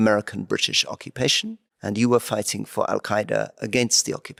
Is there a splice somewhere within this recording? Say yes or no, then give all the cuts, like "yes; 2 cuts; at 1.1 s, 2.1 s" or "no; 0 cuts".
no; 0 cuts